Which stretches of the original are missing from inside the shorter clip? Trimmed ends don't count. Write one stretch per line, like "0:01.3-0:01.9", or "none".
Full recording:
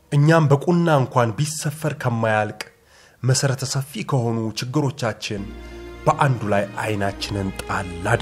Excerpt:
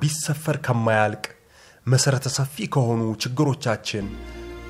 none